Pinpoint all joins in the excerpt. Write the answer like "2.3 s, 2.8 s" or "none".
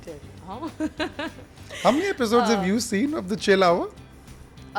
none